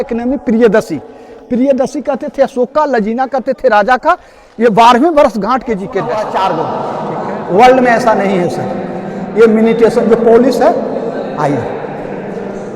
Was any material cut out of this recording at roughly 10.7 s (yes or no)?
no